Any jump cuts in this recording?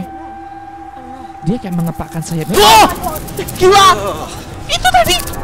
no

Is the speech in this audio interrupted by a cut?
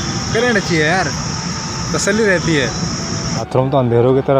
yes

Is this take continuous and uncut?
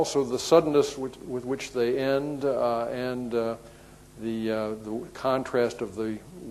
yes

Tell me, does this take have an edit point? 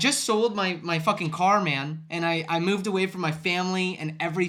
no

